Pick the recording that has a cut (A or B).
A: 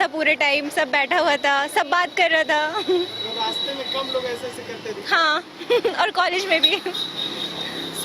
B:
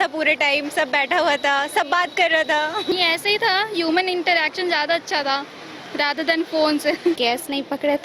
B